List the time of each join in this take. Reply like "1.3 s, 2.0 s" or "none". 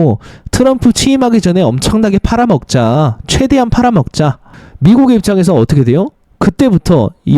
4.5 s